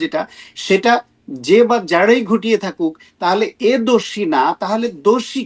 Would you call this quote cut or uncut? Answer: uncut